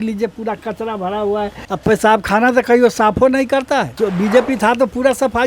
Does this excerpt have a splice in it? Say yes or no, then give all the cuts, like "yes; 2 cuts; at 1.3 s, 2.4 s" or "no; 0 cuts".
yes; 2 cuts; at 1.6 s, 3.9 s